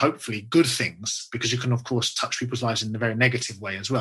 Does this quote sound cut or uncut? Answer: uncut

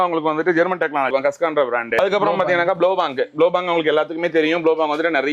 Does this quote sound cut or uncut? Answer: uncut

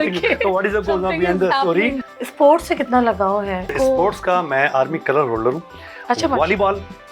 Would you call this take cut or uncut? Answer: cut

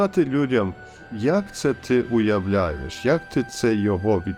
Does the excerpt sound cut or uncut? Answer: uncut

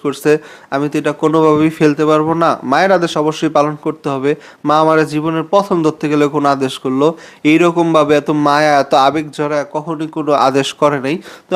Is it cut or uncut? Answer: uncut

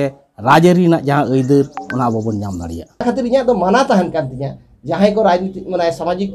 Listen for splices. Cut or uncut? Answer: uncut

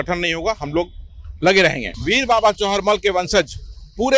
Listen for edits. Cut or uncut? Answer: cut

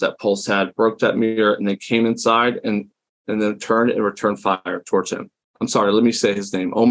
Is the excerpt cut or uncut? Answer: cut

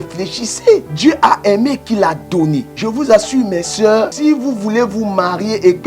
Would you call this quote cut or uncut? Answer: cut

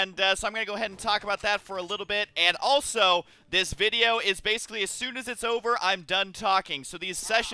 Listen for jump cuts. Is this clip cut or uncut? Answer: cut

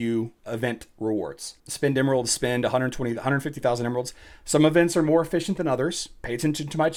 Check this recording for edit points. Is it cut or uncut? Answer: uncut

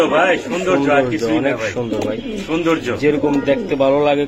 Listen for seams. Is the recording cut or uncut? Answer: uncut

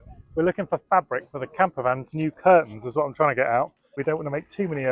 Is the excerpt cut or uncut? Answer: cut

